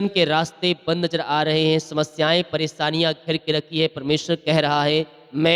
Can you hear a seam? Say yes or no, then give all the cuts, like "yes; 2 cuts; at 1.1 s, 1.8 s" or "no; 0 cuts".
no; 0 cuts